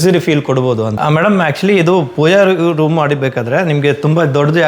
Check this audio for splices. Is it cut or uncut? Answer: cut